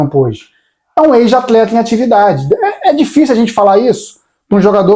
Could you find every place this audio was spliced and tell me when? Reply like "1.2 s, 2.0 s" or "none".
none